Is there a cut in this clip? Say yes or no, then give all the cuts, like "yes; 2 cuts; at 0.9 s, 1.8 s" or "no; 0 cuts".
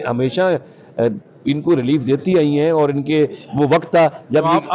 no; 0 cuts